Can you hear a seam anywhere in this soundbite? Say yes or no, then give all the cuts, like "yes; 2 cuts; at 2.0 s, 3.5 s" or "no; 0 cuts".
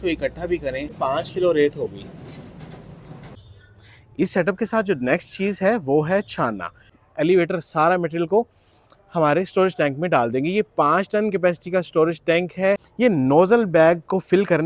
yes; 4 cuts; at 0.9 s, 3.4 s, 6.9 s, 12.9 s